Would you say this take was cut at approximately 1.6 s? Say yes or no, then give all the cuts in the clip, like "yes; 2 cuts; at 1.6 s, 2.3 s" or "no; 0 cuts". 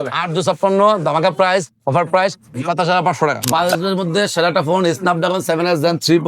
no; 1 cut; at 3.4 s